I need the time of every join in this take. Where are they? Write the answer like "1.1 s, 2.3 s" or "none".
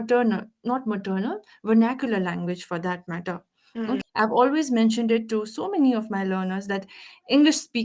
4.0 s